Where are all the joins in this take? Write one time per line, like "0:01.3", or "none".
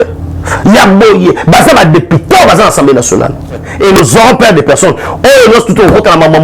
0:03.6